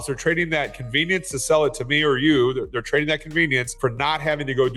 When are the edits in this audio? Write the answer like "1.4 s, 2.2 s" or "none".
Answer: 3.7 s